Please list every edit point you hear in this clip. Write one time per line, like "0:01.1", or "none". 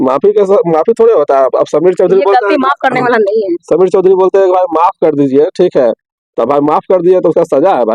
none